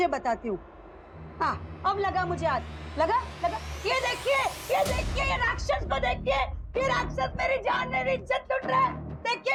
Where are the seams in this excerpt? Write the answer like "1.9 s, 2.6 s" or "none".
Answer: none